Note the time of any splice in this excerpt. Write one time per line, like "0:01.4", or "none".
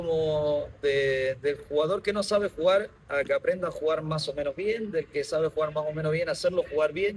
none